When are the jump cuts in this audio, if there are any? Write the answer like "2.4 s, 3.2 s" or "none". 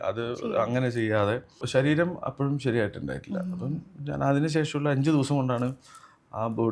1.6 s